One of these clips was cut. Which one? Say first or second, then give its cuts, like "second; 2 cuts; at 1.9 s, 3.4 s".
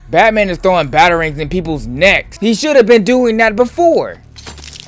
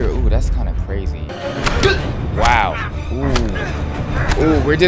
second; 1 cut; at 1.3 s